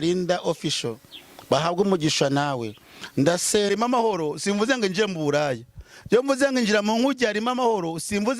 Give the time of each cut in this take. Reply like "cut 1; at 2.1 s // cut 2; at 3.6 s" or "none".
cut 1; at 3.7 s